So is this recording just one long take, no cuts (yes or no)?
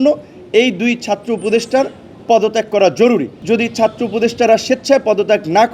no